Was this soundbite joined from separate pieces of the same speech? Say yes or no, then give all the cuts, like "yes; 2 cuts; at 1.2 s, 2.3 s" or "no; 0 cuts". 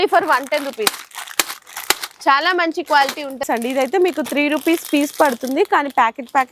yes; 1 cut; at 3.4 s